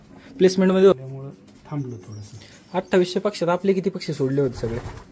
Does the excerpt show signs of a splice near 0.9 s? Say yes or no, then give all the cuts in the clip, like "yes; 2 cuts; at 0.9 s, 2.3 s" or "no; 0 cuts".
yes; 1 cut; at 0.9 s